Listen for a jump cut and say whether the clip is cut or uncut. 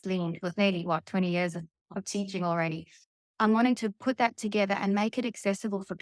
uncut